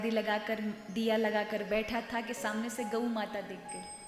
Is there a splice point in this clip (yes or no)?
no